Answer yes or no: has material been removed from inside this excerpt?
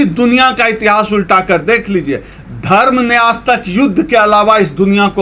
no